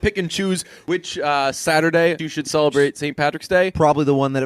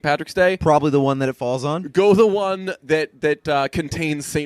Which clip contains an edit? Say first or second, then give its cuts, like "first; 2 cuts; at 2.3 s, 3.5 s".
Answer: first; 2 cuts; at 0.9 s, 2.2 s